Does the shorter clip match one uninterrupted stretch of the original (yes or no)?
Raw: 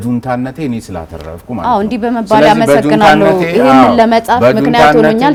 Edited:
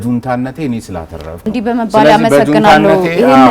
no